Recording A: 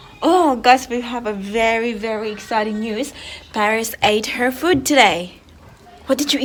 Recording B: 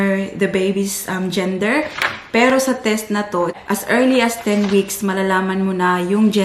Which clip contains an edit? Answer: B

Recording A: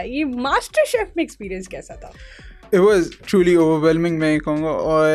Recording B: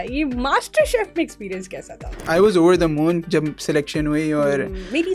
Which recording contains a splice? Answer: B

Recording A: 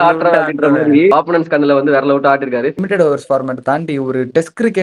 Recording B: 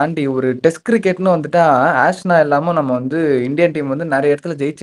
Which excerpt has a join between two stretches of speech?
A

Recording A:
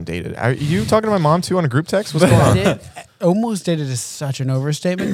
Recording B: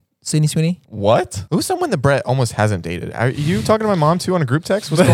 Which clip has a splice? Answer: B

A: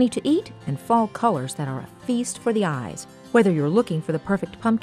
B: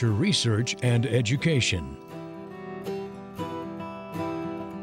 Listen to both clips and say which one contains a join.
B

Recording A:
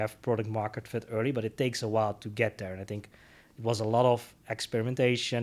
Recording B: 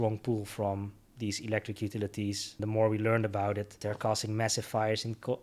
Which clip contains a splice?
B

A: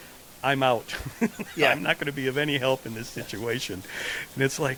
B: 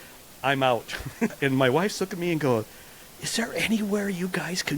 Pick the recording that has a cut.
B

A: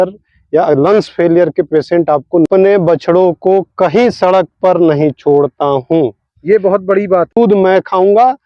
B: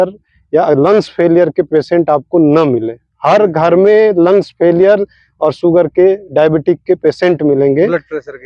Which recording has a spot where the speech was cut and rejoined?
A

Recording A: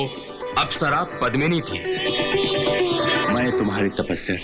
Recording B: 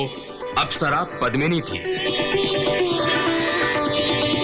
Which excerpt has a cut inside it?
A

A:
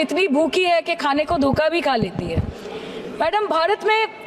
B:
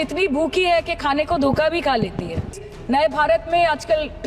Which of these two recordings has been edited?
B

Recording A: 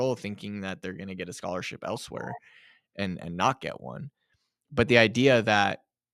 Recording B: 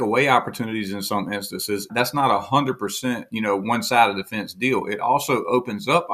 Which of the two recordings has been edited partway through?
B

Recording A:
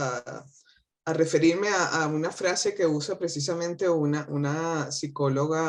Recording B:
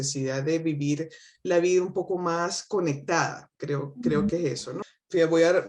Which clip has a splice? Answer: B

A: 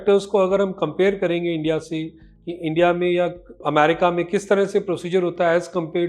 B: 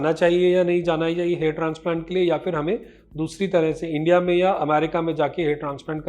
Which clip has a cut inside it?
A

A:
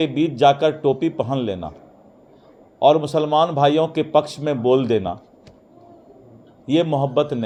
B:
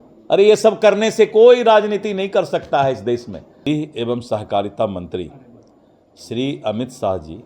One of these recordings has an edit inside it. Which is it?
B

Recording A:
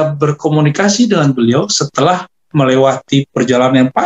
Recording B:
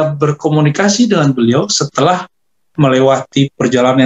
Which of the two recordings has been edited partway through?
A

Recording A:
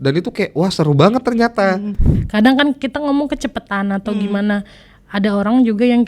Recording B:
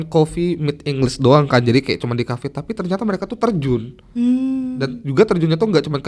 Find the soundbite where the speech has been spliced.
A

